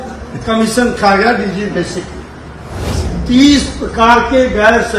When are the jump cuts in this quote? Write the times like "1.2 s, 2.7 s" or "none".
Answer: 3.0 s